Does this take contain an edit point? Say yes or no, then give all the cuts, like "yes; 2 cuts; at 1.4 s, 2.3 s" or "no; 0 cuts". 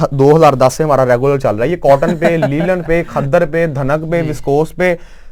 no; 0 cuts